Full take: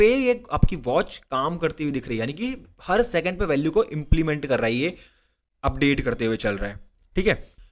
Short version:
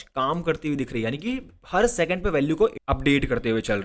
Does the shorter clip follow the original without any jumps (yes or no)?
no